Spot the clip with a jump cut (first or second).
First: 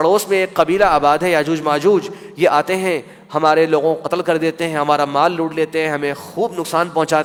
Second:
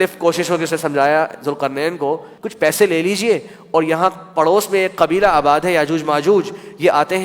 second